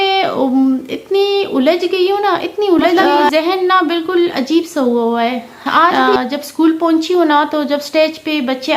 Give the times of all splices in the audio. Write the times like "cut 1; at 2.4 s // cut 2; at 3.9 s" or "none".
cut 1; at 3.3 s // cut 2; at 5.9 s

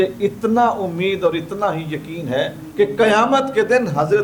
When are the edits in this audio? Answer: none

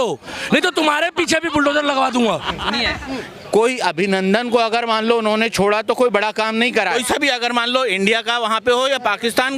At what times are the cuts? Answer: cut 1; at 3.0 s // cut 2; at 7.0 s

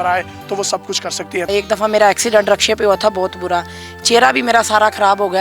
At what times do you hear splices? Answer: cut 1; at 1.5 s

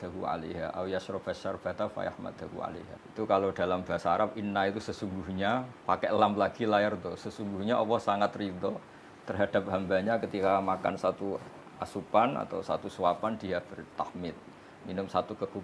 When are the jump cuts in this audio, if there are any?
cut 1; at 3.0 s

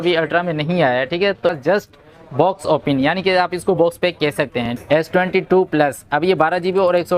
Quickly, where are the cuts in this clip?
cut 1; at 1.4 s // cut 2; at 4.8 s

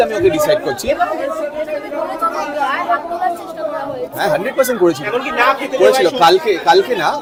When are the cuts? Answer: none

